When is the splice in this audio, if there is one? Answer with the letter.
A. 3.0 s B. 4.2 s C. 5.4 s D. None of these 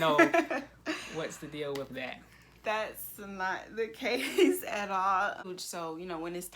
C